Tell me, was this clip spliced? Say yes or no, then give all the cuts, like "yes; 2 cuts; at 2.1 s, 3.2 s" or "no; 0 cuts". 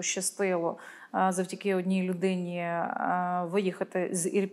no; 0 cuts